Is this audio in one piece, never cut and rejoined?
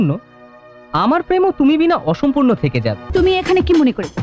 no; 1 cut; at 3.0 s

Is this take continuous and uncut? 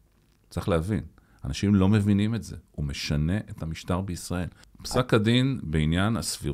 yes; 0 cuts

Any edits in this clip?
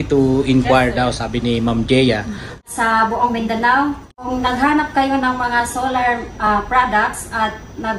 yes; 1 cut; at 2.6 s

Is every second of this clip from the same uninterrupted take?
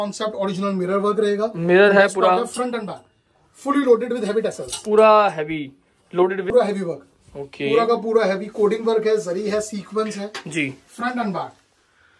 no; 1 cut; at 6.5 s

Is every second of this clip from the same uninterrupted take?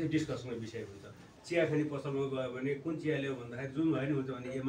no; 1 cut; at 1.2 s

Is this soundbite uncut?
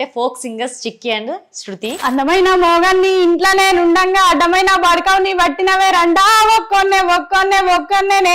no; 1 cut; at 2.0 s

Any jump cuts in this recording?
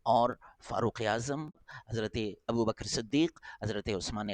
yes; 1 cut; at 1.7 s

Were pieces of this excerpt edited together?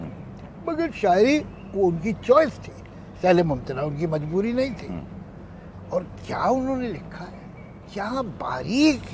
no; 0 cuts

